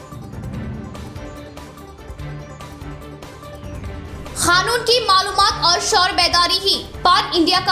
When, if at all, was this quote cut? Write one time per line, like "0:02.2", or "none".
0:03.7